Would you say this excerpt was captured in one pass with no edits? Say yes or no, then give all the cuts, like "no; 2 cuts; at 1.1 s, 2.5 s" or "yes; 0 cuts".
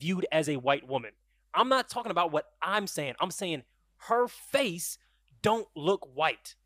yes; 0 cuts